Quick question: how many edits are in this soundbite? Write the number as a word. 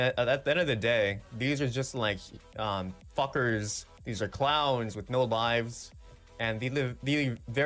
zero